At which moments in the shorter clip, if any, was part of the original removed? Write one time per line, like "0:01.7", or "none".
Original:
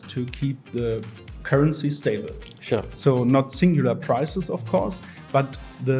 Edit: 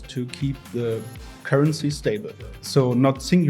0:02.6